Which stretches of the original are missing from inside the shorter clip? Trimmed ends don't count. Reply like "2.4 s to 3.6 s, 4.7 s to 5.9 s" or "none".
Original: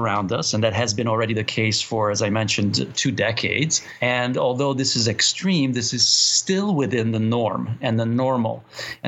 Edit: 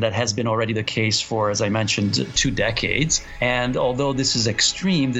none